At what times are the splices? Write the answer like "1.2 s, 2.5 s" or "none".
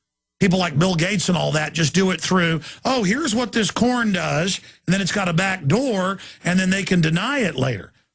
3.7 s